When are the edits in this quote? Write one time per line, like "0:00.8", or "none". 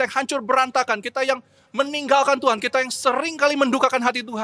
none

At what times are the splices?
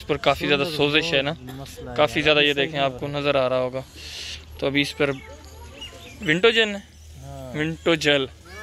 none

